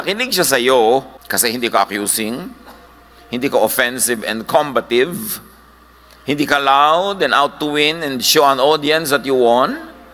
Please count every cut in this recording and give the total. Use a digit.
1